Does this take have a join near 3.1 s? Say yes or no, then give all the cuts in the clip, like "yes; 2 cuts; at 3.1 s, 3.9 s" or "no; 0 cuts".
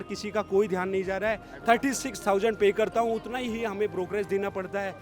no; 1 cut; at 1.5 s